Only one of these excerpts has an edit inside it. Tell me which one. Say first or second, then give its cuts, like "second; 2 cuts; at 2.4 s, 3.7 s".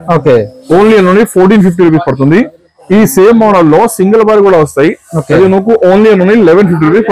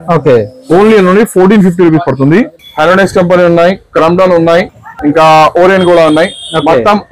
second; 1 cut; at 2.6 s